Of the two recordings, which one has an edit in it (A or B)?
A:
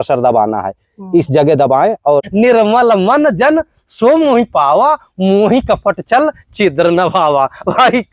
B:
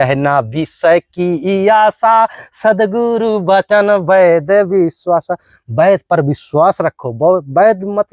A